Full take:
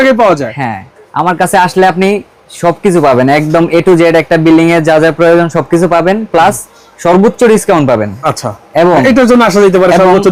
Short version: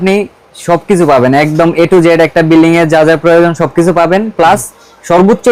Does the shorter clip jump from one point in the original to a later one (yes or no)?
no